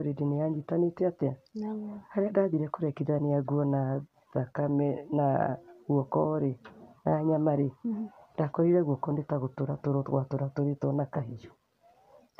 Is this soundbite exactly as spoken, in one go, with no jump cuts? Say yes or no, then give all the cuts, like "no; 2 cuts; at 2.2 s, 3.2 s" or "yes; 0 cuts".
yes; 0 cuts